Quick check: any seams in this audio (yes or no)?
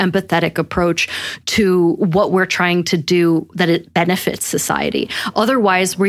no